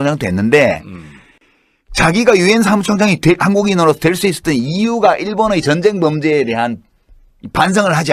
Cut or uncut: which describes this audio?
cut